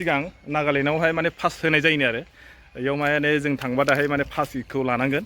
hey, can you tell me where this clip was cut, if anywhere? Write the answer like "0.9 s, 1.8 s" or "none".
none